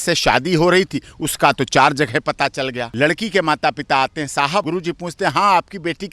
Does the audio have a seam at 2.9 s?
yes; 2 cuts; at 2.9 s, 4.7 s

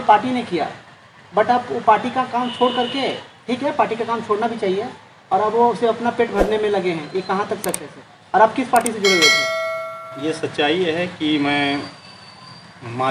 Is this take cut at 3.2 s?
no; 0 cuts

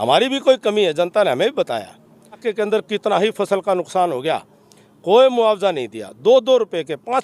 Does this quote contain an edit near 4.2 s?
no; 1 cut; at 2.4 s

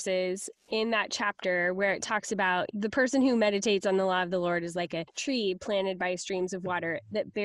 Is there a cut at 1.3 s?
no; 2 cuts; at 2.7 s, 5.1 s

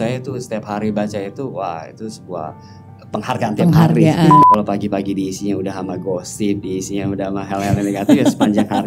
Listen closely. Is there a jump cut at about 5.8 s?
no; 1 cut; at 4.4 s

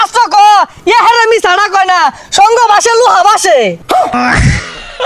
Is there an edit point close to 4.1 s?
yes; 1 cut; at 4.1 s

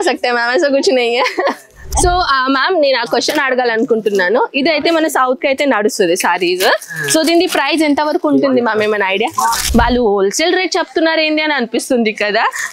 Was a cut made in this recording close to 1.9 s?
yes; 2 cuts; at 1.9 s, 9.6 s

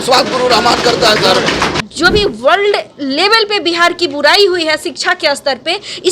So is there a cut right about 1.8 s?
yes; 1 cut; at 1.8 s

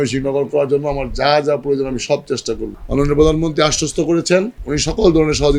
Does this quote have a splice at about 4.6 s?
yes; 1 cut; at 4.6 s

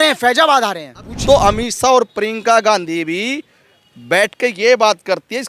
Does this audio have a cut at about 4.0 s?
no; 1 cut; at 1.1 s

